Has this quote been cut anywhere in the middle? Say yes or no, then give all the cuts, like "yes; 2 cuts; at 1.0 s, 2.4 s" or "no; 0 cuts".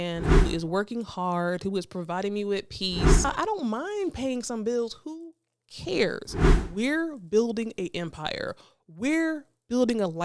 yes; 2 cuts; at 3.3 s, 6.6 s